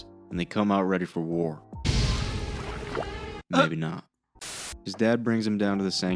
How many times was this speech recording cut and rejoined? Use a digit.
1